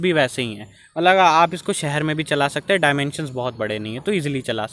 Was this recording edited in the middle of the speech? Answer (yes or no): no